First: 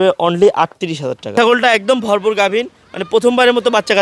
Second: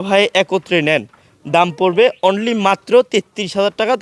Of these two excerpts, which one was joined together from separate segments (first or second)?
first